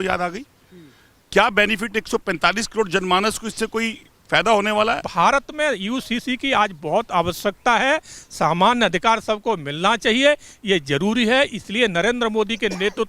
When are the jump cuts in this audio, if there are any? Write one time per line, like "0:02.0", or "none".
0:05.1

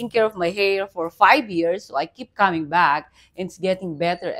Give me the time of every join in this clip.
none

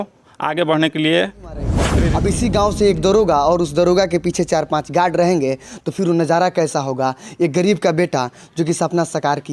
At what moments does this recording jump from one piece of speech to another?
0:01.9

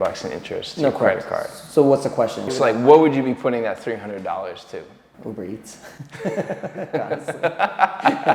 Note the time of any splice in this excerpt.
0:02.5
0:05.0

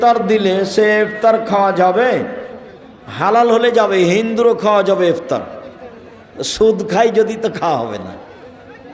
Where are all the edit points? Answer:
none

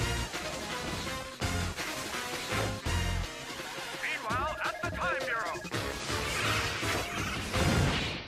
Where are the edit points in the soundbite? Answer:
none

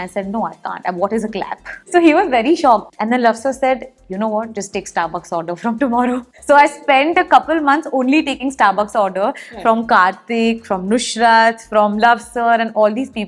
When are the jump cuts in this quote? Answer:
0:01.8
0:02.9
0:06.3

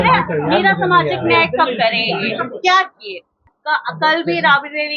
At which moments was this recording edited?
0:03.5

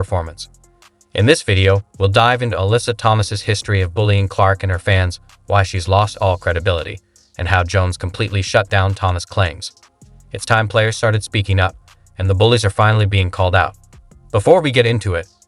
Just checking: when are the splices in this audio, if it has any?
0:09.9

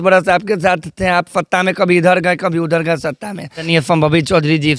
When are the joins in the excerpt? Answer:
0:03.7

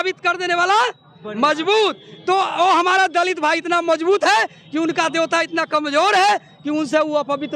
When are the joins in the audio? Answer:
none

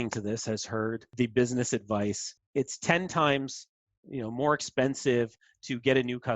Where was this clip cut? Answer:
0:01.1
0:02.3

